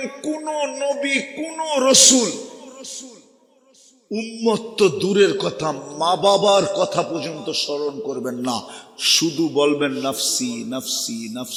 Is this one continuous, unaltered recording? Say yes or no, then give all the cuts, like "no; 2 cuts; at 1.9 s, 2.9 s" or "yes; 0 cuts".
yes; 0 cuts